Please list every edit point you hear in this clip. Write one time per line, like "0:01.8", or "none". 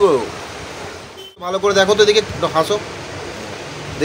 0:01.5